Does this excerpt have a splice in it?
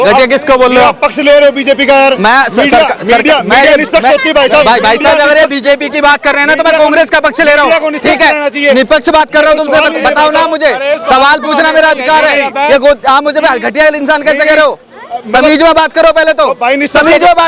no; 0 cuts

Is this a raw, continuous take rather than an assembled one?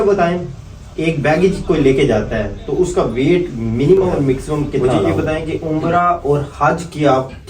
no; 1 cut; at 5.1 s

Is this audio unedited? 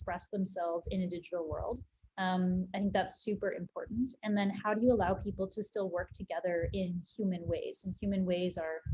yes; 0 cuts

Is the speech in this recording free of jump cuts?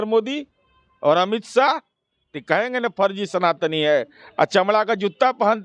yes; 0 cuts

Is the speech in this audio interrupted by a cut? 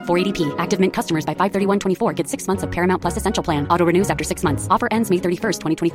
no; 0 cuts

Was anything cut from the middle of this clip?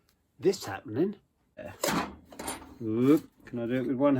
yes; 1 cut; at 1.7 s

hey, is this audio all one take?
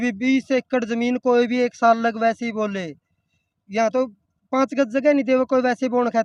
yes; 0 cuts

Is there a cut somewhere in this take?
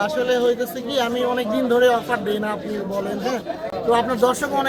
no; 0 cuts

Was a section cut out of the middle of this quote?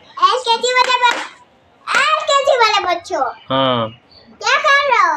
no; 0 cuts

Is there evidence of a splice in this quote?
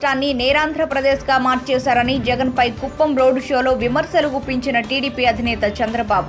no; 0 cuts

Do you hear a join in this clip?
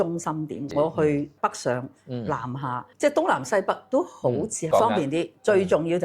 yes; 1 cut; at 4.7 s

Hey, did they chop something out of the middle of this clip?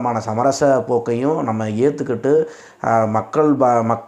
no; 0 cuts

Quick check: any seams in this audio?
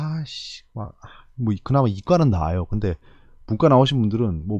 no; 0 cuts

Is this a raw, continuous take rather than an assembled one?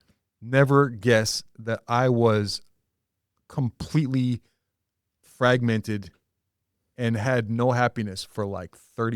yes; 0 cuts

